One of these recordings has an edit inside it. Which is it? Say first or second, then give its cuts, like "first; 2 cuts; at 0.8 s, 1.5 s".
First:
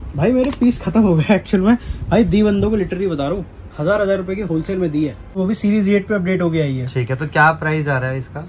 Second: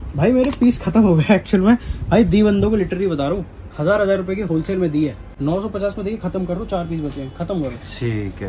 first; 1 cut; at 5.3 s